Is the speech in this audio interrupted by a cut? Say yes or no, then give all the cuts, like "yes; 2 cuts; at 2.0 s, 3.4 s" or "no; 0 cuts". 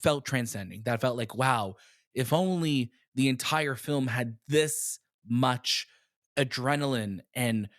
no; 0 cuts